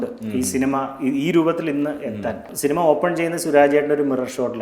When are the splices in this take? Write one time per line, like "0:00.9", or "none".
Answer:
0:02.5